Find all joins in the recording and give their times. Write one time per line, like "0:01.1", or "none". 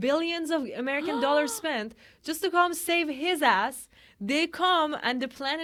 none